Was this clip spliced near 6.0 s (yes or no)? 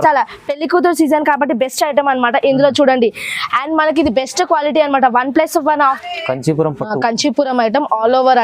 yes